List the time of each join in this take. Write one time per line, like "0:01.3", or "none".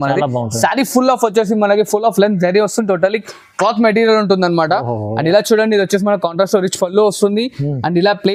none